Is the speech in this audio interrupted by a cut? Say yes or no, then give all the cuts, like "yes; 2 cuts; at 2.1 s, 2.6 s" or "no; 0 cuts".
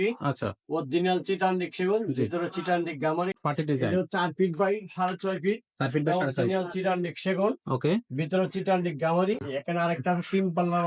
yes; 2 cuts; at 3.4 s, 9.4 s